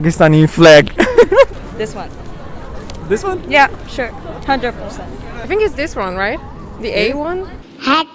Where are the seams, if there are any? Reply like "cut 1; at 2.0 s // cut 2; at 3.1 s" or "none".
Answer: cut 1; at 1.6 s // cut 2; at 5.4 s